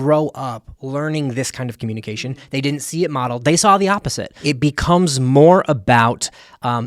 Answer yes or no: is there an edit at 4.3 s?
yes